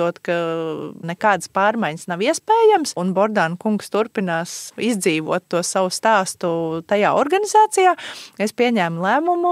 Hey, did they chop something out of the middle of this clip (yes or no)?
yes